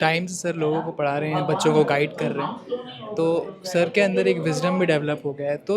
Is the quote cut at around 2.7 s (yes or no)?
no